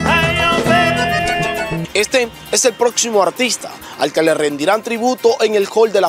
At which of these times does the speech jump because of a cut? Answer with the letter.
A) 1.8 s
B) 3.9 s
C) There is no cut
A